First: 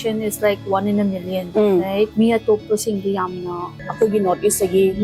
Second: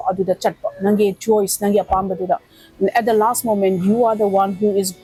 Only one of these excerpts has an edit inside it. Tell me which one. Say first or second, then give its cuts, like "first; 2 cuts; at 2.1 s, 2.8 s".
first; 3 cuts; at 1.4 s, 2.1 s, 3.8 s